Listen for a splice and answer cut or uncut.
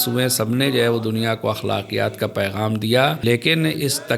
cut